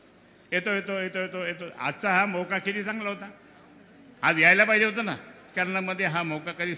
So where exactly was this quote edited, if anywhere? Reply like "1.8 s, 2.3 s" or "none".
5.5 s